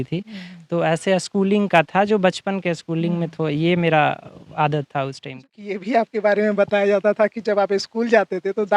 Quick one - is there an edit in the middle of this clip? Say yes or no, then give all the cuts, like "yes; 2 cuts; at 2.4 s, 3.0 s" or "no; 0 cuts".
yes; 1 cut; at 5.7 s